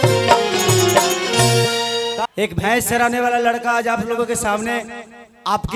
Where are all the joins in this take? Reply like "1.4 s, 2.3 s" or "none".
2.3 s